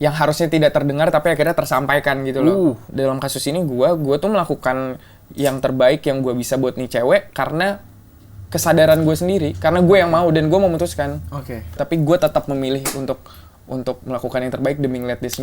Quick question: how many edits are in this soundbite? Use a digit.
2